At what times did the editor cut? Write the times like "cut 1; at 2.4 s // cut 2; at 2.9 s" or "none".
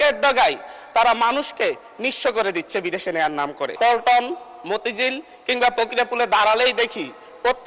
cut 1; at 3.8 s